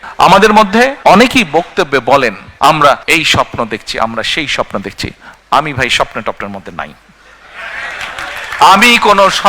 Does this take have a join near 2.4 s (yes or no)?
yes